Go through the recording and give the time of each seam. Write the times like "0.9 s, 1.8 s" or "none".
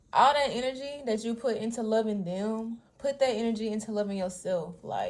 none